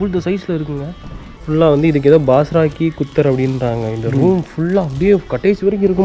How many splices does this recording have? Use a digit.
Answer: 1